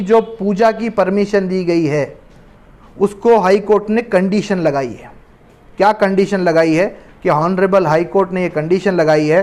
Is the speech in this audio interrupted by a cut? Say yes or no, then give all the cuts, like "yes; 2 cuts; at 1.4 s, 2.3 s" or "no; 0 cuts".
no; 0 cuts